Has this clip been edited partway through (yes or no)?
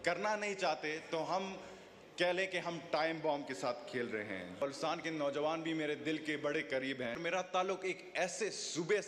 yes